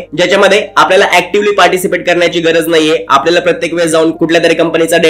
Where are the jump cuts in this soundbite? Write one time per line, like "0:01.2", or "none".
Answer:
none